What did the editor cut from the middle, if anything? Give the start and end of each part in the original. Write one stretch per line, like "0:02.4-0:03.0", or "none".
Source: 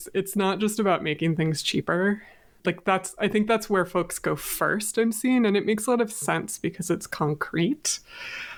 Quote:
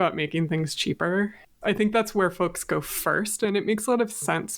0:02.4-0:03.1
0:05.0-0:05.4